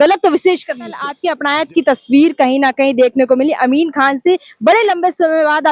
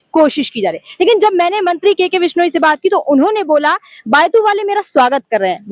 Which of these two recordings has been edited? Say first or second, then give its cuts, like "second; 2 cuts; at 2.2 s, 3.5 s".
first; 1 cut; at 1.2 s